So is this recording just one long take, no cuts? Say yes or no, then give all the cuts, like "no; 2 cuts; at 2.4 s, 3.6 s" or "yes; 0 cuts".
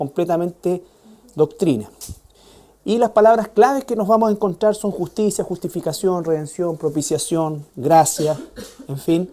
no; 1 cut; at 4.1 s